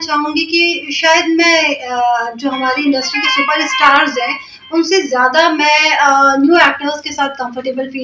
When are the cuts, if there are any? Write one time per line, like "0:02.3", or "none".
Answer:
none